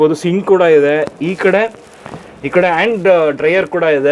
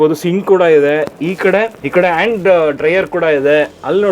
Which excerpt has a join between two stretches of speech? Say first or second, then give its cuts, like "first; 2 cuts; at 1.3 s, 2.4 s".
second; 1 cut; at 1.8 s